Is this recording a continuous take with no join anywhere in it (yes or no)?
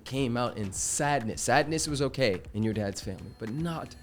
yes